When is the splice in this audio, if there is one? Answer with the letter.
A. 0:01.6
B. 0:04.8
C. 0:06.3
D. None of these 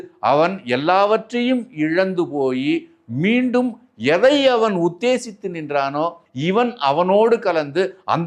C